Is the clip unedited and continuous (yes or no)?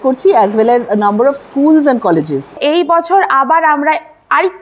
no